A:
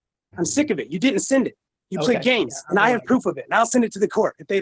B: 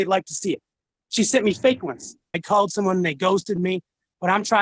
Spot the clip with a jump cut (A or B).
B